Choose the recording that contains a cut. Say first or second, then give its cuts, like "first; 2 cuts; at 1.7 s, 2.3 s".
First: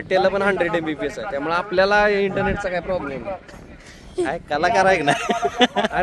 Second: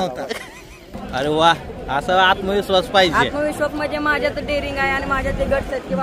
second; 1 cut; at 0.9 s